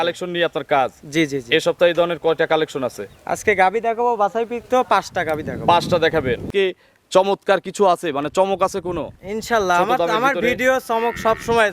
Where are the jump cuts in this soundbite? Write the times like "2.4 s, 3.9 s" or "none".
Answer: 6.5 s

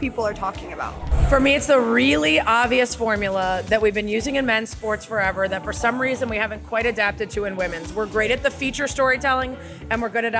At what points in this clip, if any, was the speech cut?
1.1 s

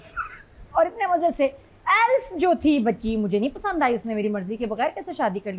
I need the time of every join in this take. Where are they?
none

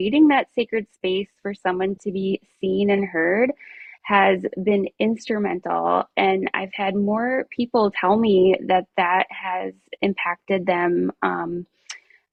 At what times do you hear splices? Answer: none

